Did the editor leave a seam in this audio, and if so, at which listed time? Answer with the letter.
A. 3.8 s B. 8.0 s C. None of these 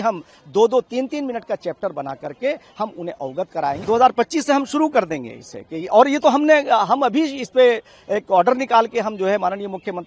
A